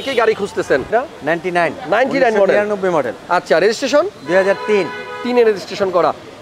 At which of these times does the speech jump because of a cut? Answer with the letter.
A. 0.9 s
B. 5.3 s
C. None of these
A